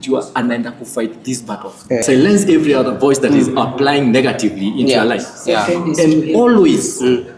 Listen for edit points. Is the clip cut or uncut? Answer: cut